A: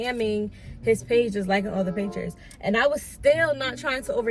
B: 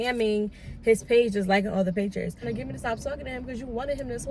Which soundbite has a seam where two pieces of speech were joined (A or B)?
B